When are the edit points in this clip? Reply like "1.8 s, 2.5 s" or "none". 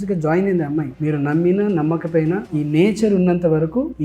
0.9 s

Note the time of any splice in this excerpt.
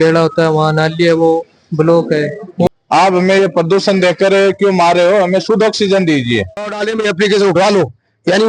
2.7 s, 6.7 s

